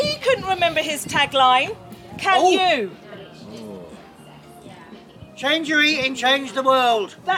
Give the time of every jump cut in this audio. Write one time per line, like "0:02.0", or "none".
none

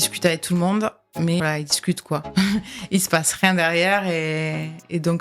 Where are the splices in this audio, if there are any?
0:01.4

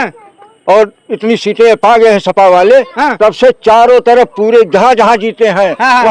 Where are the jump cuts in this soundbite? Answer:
none

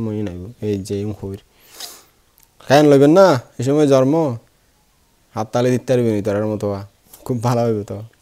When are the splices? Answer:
none

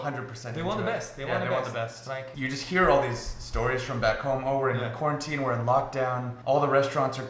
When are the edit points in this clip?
0:02.3

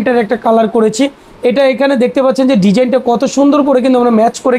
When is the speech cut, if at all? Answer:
none

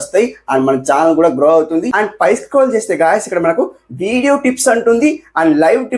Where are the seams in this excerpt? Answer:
0:01.9

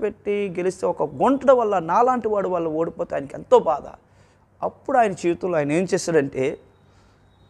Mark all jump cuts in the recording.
none

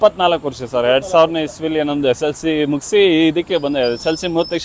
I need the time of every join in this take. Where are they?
none

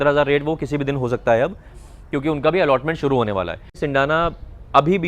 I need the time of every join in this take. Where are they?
0:03.8

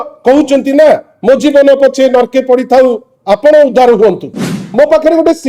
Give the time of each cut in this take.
0:04.6

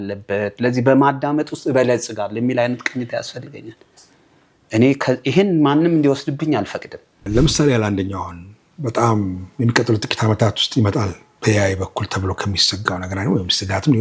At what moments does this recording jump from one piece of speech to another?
0:07.2

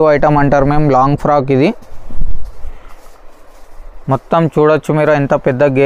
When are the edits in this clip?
none

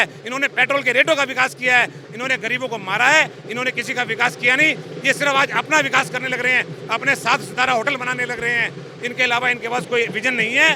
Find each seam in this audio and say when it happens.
none

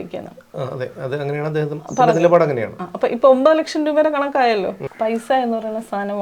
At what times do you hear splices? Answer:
0:04.8

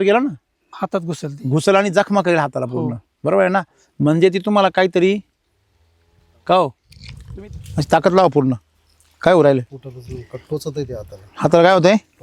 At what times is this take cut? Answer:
none

